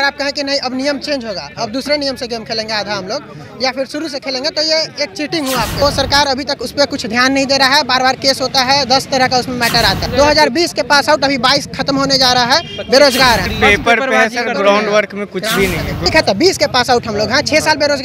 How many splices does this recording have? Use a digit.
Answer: 4